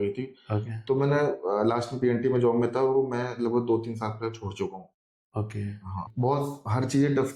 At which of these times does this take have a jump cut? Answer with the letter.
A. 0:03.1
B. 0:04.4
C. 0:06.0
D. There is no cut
C